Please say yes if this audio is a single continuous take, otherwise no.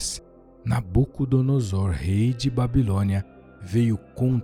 yes